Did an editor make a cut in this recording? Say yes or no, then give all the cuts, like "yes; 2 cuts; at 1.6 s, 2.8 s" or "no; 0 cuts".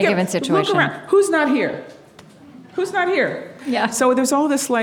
yes; 1 cut; at 3.6 s